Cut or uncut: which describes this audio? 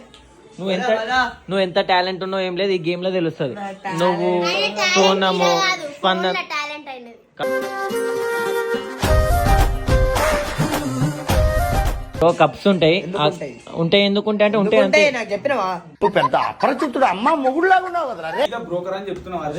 cut